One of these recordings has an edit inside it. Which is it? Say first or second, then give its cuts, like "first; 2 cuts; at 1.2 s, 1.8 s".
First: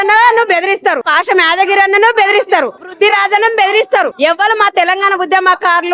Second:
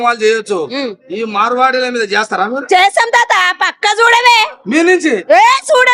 first; 3 cuts; at 1.1 s, 2.9 s, 4.1 s